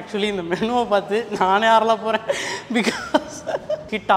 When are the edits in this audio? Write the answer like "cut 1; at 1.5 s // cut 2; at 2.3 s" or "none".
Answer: none